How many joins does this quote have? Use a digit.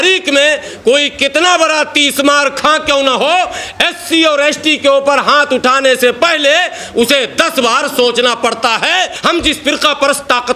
1